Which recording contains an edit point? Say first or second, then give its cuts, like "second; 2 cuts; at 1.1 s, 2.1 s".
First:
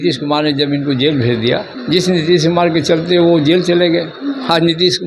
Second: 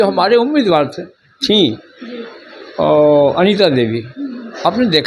first; 1 cut; at 1.7 s